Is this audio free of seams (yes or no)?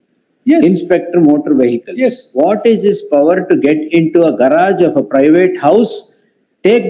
yes